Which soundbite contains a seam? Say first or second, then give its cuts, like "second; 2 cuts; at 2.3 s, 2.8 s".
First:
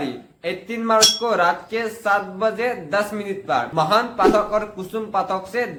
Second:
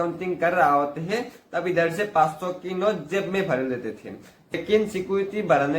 second; 1 cut; at 4.5 s